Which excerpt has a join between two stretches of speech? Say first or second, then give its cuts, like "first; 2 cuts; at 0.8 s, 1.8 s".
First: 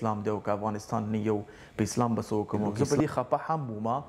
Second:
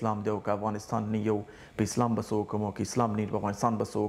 first; 1 cut; at 2.7 s